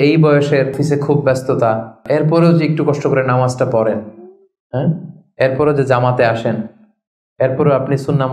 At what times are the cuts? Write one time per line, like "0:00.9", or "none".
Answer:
0:00.8
0:02.0